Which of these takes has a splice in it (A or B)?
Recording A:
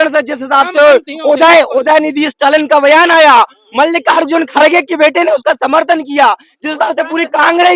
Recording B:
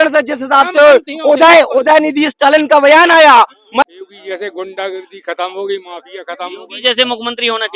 B